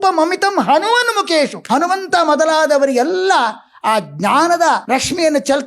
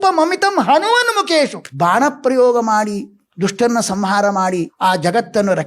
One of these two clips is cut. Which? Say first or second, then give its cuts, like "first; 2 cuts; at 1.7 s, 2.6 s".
second; 1 cut; at 1.6 s